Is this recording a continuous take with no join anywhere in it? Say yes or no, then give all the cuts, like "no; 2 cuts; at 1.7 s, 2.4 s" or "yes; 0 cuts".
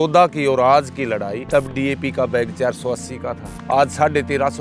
no; 2 cuts; at 1.4 s, 3.5 s